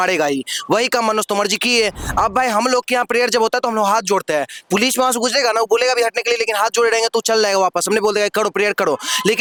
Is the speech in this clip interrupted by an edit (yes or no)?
no